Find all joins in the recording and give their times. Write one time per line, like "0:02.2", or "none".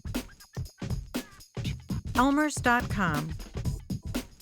0:02.2
0:03.2

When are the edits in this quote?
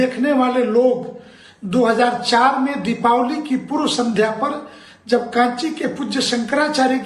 0:03.4

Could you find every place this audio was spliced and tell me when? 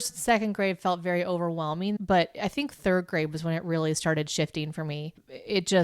0:02.0

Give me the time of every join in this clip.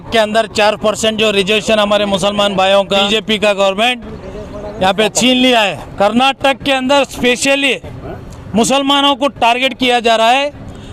0:03.1
0:05.8

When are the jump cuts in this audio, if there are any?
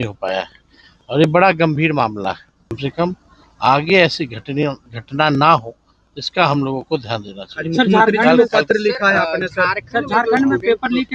0:02.8

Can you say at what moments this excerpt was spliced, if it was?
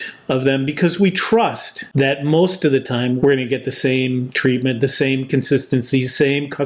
0:01.9
0:03.2

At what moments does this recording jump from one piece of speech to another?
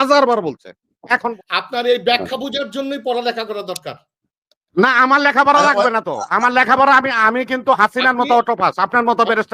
0:01.3

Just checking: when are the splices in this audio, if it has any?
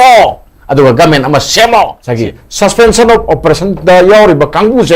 0:02.0

